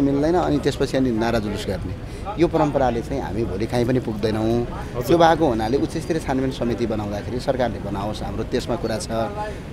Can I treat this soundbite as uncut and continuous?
yes; 0 cuts

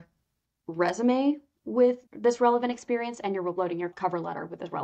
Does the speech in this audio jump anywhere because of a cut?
yes; 2 cuts; at 2.1 s, 3.9 s

